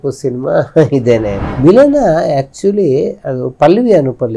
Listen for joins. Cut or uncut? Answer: cut